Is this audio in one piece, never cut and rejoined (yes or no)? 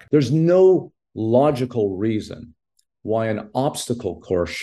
yes